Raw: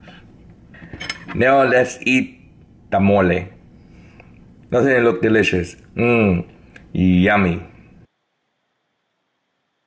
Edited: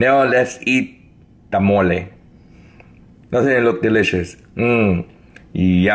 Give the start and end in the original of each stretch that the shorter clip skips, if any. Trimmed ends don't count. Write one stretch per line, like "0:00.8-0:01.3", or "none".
none